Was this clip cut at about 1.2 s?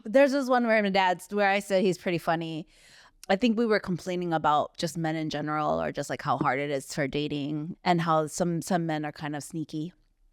no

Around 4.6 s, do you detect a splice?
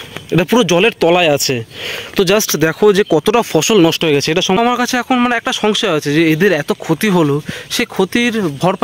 yes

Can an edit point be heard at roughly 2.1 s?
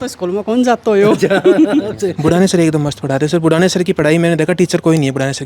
yes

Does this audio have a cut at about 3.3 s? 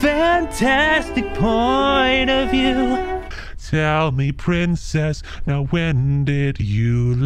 yes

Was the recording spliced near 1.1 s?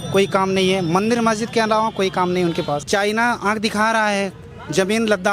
no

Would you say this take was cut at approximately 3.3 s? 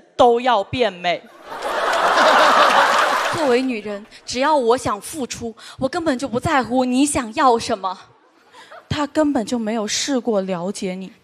yes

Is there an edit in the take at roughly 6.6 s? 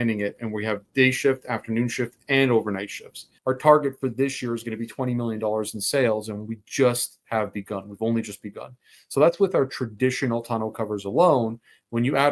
no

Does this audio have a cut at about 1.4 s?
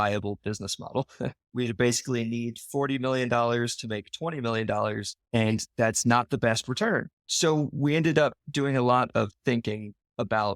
yes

